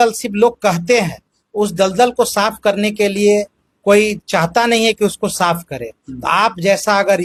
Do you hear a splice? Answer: no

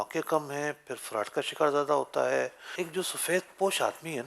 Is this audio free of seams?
no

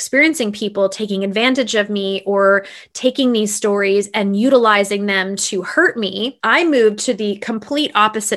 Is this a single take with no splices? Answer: no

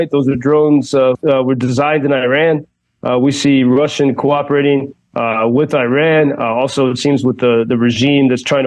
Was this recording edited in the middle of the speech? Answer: yes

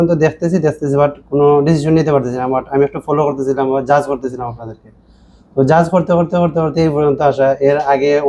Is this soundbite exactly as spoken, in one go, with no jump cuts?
yes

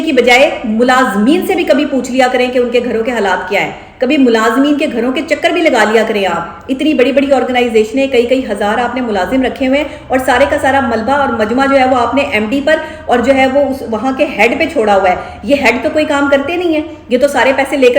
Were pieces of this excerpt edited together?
no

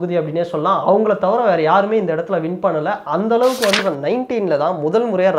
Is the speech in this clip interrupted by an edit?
yes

